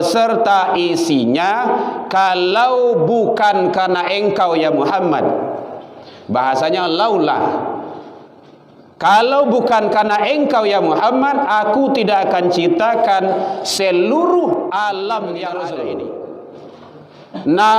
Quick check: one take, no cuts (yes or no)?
no